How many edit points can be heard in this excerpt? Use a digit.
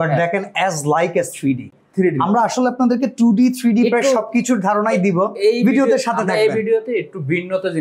0